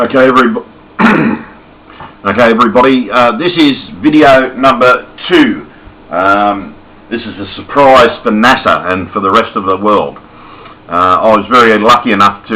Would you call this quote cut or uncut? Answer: uncut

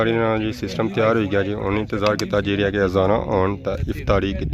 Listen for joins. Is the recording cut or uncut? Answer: uncut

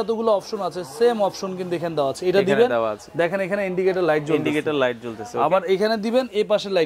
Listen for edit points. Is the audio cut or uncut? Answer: uncut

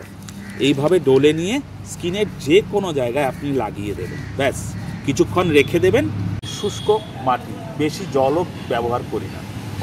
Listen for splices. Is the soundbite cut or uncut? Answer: cut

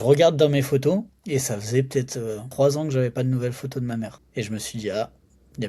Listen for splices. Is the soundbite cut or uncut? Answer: cut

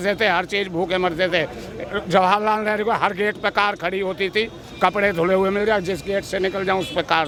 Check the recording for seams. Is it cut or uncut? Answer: uncut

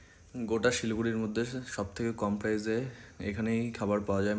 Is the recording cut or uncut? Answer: uncut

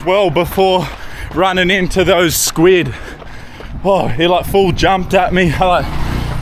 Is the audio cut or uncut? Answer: uncut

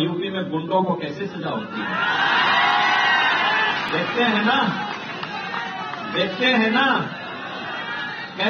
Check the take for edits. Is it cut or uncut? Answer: uncut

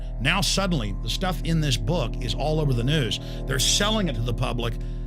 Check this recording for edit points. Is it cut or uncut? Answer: cut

